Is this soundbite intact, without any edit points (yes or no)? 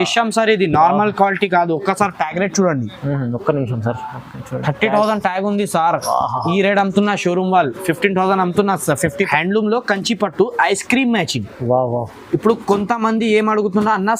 no